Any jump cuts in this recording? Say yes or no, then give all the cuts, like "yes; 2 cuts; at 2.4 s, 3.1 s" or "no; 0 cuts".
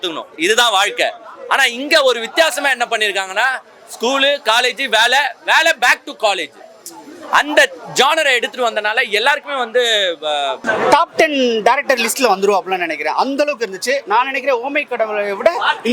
yes; 1 cut; at 10.6 s